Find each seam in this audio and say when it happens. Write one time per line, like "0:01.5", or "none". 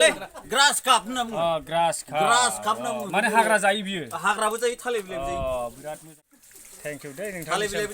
0:06.1